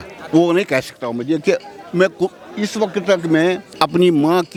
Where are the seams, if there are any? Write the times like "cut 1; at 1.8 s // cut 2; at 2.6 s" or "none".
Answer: none